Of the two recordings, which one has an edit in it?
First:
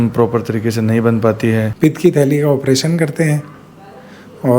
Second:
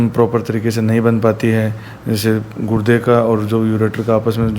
first; 1 cut; at 1.7 s

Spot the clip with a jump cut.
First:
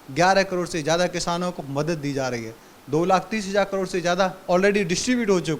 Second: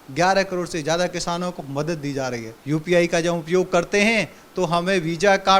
second; 1 cut; at 2.5 s

